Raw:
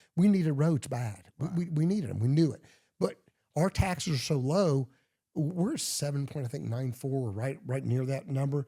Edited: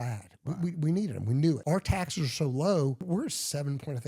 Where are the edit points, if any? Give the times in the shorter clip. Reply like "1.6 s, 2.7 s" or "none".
1.6 s, 3.0 s